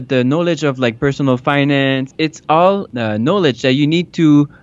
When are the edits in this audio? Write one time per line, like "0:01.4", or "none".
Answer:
0:02.1
0:02.9

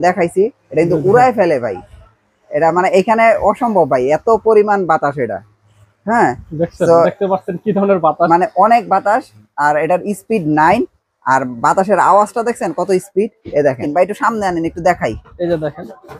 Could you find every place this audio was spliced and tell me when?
0:13.8

